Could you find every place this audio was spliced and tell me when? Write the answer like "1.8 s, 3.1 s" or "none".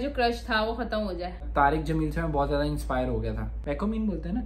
1.5 s, 3.5 s